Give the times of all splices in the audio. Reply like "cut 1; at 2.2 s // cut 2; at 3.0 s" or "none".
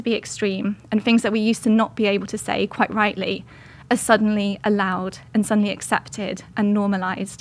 none

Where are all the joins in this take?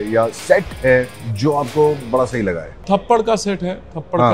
cut 1; at 1.2 s // cut 2; at 2.8 s

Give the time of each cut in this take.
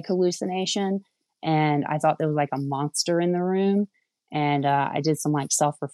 none

